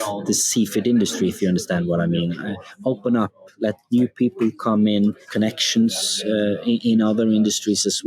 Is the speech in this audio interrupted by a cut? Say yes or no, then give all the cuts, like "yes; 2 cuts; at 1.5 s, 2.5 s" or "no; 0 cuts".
yes; 1 cut; at 5.2 s